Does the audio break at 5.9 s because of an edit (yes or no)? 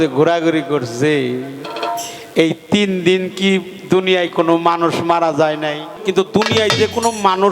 yes